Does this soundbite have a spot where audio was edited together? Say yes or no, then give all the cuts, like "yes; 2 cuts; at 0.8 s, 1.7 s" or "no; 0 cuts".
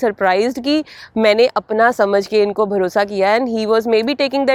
no; 0 cuts